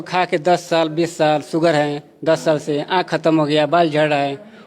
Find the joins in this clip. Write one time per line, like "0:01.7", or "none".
none